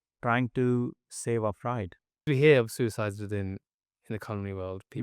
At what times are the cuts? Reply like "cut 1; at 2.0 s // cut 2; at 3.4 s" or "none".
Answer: cut 1; at 2.2 s